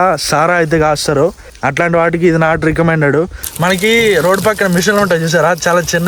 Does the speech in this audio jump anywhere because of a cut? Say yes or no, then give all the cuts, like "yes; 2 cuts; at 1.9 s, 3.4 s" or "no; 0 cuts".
yes; 1 cut; at 3.4 s